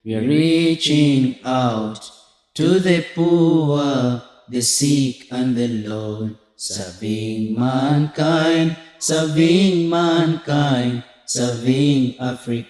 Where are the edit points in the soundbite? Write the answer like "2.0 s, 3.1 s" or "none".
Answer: none